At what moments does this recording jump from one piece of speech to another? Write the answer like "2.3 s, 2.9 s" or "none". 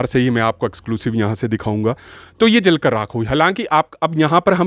none